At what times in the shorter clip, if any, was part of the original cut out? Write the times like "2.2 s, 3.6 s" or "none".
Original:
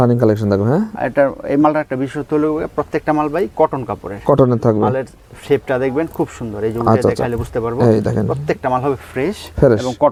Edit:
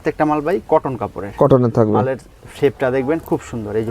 none